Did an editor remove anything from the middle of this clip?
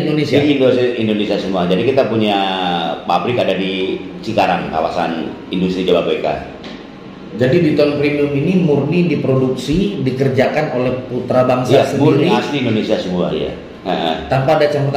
no; 0 cuts

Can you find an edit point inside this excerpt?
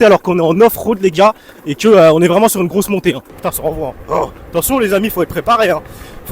yes; 1 cut; at 3.3 s

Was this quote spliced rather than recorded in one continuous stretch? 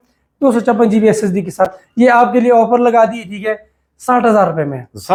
no; 0 cuts

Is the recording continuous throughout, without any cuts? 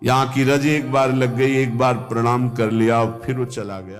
yes; 0 cuts

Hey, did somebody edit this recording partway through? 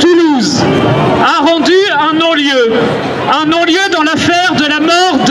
no; 0 cuts

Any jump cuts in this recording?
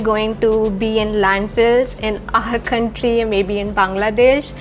no; 0 cuts

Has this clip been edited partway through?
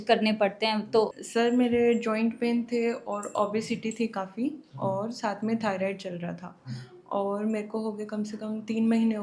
yes; 1 cut; at 1.2 s

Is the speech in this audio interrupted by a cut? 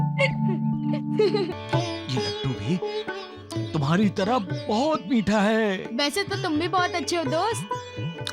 yes; 1 cut; at 1.5 s

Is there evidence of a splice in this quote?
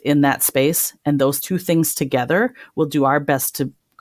yes; 1 cut; at 1.4 s

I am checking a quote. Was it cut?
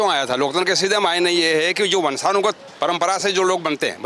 no; 0 cuts

